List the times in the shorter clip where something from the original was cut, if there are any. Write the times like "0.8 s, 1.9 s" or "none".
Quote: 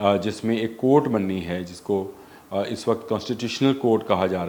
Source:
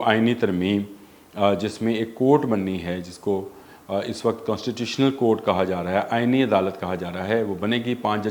none